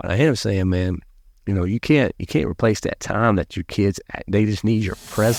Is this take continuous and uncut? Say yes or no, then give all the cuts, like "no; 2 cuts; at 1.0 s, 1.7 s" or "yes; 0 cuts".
yes; 0 cuts